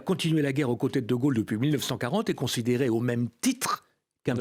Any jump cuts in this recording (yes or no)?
no